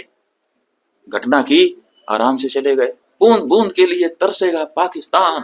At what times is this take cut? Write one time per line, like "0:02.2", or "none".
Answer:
0:03.0